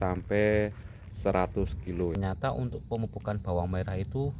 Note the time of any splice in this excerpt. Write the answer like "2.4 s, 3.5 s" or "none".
2.2 s